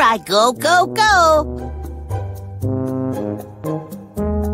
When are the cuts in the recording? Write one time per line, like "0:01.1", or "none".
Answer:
0:01.5